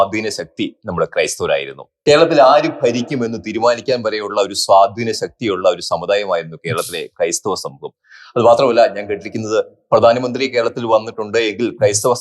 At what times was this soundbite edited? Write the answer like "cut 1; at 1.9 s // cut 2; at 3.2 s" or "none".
cut 1; at 1.9 s